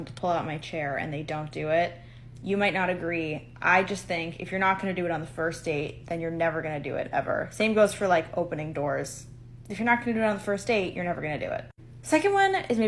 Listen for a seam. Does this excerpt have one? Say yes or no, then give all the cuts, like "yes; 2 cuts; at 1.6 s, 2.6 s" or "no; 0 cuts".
yes; 1 cut; at 8.2 s